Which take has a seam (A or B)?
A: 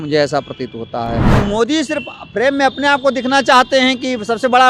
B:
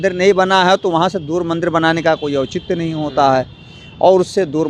A